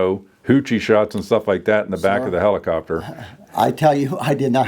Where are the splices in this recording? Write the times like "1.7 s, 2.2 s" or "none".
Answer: none